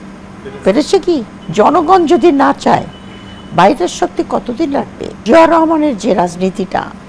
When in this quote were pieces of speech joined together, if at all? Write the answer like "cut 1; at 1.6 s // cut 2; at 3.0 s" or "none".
cut 1; at 1.4 s // cut 2; at 5.2 s